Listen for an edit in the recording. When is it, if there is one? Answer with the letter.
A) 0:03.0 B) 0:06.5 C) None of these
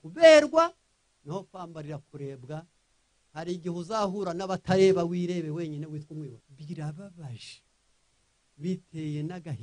B